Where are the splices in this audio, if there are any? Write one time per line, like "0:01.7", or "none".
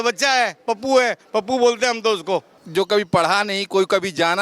0:02.6

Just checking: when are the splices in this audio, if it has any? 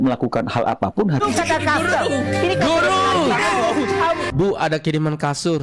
0:01.2
0:04.2

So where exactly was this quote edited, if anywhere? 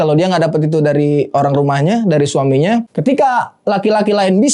0:02.9

